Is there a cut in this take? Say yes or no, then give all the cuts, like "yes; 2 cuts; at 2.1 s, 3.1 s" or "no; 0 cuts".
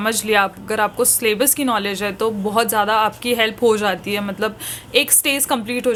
no; 0 cuts